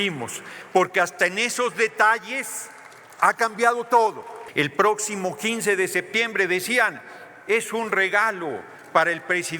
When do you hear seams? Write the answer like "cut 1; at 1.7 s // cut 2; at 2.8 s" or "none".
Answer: cut 1; at 4.4 s